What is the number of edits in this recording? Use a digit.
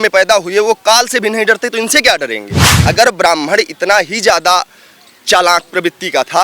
1